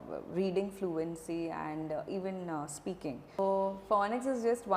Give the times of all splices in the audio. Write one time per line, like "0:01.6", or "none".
0:03.4